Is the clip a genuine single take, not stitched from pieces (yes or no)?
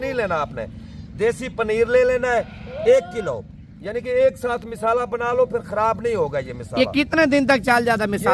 yes